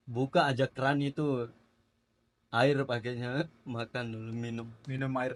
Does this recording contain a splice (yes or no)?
no